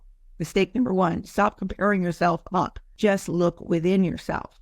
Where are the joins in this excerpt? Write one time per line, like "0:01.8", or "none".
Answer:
0:02.8